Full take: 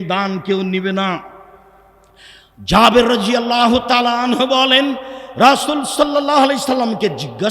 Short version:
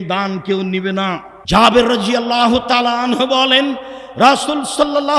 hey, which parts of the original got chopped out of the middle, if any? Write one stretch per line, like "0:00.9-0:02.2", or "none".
0:01.3-0:02.5